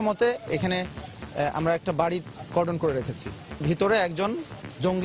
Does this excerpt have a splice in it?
yes; 1 cut; at 3.6 s

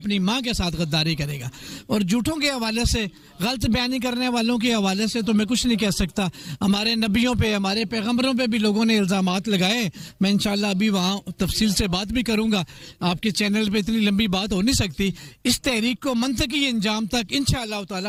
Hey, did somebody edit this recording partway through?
no; 0 cuts

